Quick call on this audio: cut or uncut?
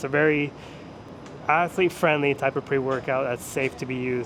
uncut